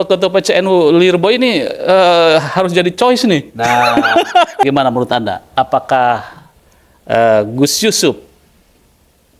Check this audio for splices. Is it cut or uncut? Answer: cut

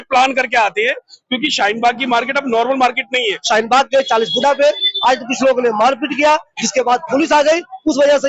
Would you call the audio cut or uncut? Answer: cut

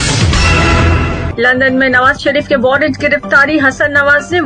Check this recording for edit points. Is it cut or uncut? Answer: uncut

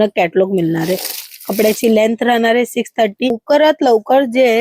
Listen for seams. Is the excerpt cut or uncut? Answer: cut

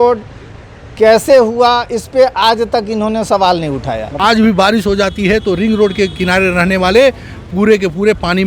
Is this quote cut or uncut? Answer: cut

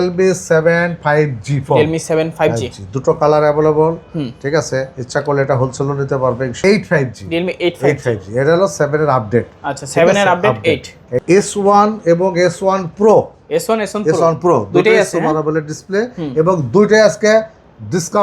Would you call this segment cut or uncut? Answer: cut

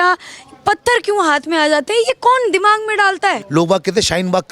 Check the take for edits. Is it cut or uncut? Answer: cut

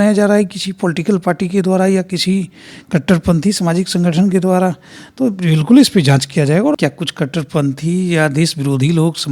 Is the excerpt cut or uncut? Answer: cut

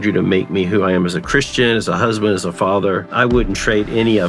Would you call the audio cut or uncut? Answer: cut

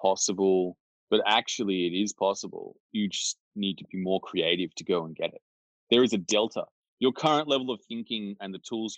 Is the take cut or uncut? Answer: uncut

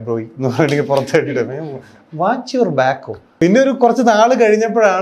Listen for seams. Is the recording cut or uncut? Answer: cut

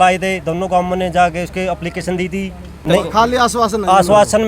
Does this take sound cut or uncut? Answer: cut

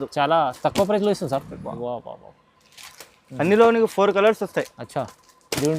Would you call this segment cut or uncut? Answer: cut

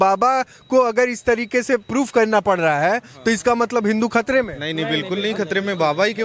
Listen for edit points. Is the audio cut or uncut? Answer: uncut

